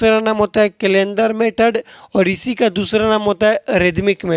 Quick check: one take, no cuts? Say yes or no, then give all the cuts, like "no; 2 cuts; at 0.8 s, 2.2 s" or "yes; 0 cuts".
yes; 0 cuts